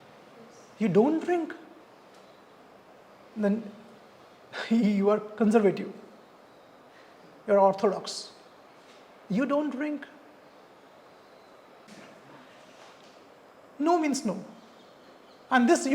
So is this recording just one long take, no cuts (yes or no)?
no